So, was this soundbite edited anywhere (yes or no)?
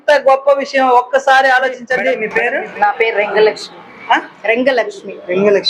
yes